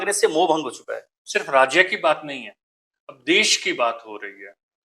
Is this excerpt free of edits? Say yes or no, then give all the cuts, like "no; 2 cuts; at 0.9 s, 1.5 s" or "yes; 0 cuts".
no; 1 cut; at 1.1 s